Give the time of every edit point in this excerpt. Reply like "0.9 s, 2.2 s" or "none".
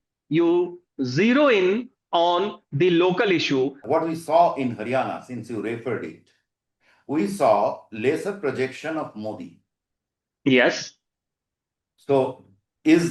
3.8 s